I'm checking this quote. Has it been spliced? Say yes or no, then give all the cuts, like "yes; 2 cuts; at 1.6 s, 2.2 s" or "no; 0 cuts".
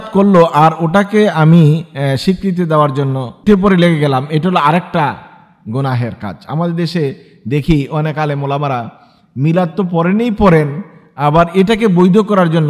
yes; 1 cut; at 3.4 s